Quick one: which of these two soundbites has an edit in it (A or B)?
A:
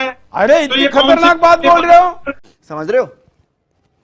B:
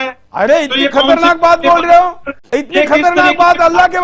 B